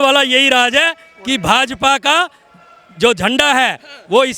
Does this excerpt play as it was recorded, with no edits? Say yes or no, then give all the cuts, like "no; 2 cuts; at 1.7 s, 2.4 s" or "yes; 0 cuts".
yes; 0 cuts